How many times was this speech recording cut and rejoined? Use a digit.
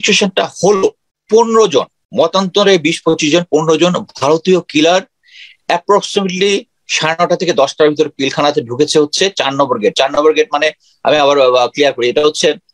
2